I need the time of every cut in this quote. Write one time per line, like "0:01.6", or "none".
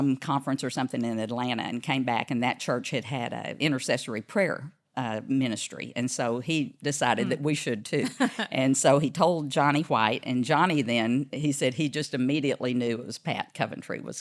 0:03.5